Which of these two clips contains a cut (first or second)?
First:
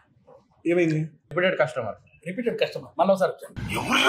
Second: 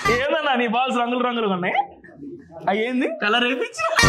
first